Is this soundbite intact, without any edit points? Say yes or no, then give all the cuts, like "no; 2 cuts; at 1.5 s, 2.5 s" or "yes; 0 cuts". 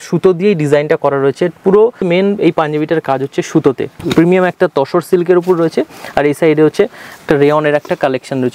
no; 2 cuts; at 2.0 s, 4.0 s